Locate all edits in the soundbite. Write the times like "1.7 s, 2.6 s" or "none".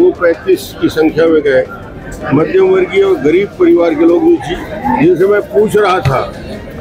none